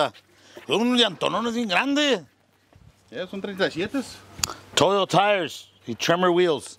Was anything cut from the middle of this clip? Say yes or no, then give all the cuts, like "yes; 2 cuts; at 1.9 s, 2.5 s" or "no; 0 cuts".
no; 0 cuts